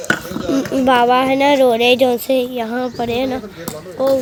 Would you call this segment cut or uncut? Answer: uncut